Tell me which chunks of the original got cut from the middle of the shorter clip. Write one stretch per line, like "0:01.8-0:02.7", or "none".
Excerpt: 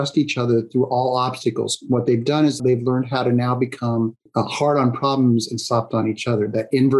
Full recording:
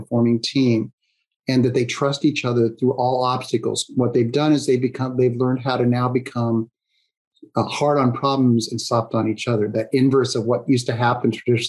0:04.6-0:05.1
0:06.8-0:07.4